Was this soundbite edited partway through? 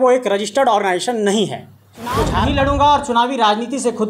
yes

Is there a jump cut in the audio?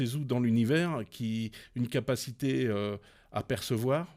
no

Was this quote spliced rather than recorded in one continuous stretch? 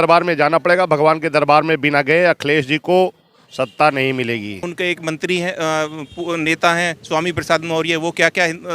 yes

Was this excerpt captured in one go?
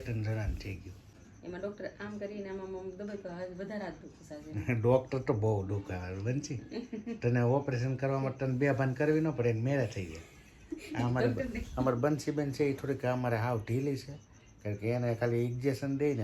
no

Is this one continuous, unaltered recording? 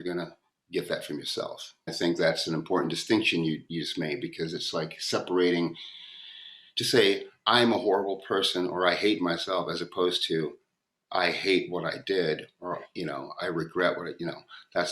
no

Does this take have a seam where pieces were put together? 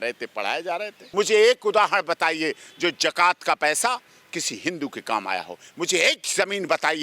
yes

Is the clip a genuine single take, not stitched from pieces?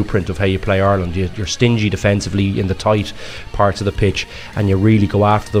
yes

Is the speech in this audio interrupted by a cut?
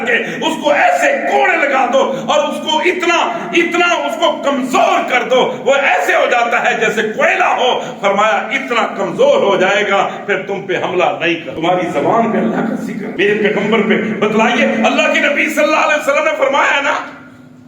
yes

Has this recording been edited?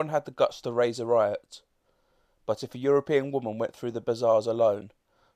yes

